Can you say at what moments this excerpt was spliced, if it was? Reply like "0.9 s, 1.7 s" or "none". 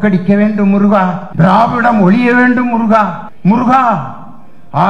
1.2 s, 3.2 s